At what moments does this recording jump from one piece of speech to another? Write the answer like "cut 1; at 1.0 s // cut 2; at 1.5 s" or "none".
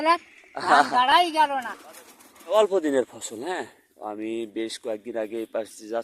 cut 1; at 1.8 s